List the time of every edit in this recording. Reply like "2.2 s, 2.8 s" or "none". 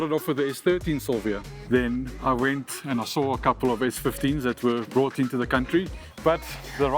1.7 s, 6.0 s